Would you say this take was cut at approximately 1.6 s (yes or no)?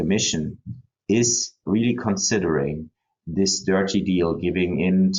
yes